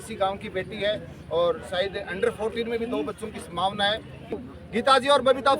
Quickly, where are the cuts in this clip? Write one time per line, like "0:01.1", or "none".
0:04.3